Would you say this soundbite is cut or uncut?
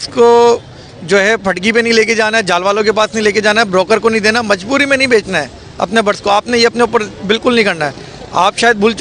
uncut